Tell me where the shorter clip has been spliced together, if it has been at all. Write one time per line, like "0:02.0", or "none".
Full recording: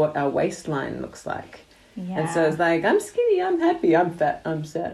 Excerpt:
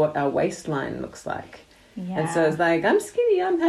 none